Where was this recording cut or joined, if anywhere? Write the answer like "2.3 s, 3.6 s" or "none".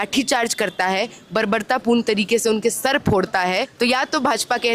3.7 s